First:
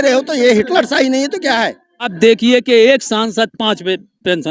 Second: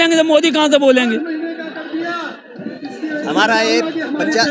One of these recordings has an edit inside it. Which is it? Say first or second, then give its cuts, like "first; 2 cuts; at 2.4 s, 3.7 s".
first; 1 cut; at 2.1 s